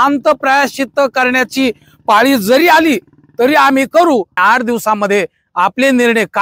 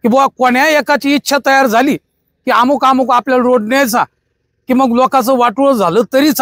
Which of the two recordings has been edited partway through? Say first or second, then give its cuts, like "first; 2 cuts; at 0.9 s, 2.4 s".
first; 1 cut; at 4.3 s